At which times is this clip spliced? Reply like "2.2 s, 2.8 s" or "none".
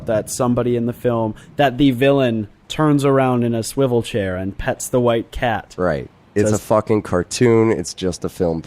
3.6 s